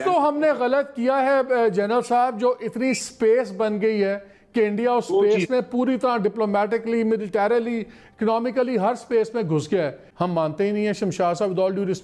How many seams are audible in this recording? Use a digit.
1